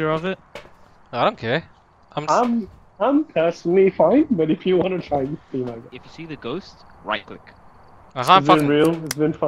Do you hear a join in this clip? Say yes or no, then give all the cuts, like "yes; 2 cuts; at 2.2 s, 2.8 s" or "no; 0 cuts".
no; 0 cuts